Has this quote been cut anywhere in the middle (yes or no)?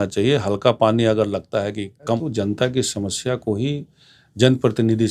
yes